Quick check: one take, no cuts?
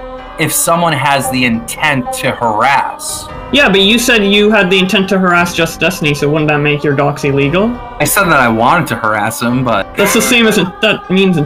no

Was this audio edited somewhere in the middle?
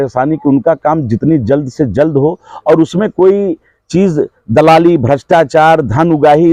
no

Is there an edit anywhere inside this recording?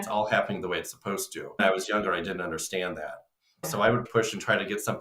yes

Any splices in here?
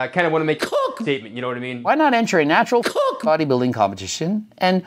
yes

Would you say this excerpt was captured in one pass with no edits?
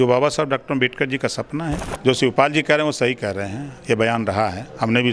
no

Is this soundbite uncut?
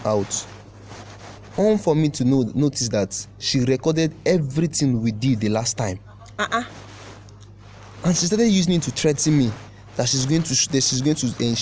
yes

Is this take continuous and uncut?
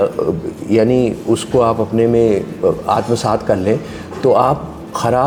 yes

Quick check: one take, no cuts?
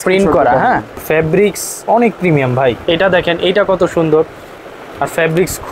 no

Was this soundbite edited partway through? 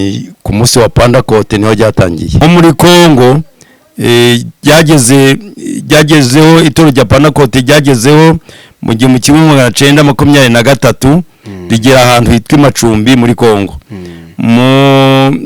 yes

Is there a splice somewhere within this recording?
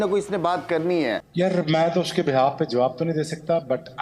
yes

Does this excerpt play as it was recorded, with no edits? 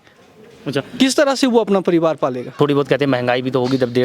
no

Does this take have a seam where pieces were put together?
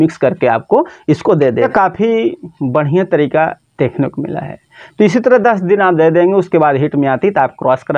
yes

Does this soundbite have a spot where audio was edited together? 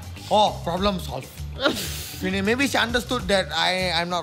no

